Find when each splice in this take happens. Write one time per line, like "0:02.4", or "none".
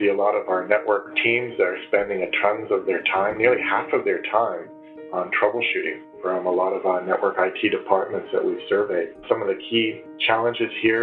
0:01.1